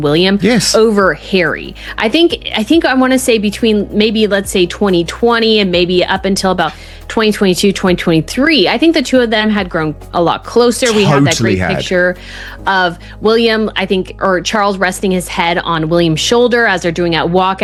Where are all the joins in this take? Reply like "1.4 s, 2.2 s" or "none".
none